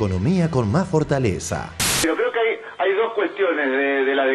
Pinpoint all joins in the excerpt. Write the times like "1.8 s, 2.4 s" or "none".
2.0 s